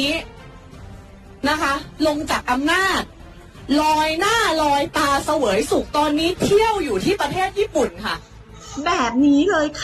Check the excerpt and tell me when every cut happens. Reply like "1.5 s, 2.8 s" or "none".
none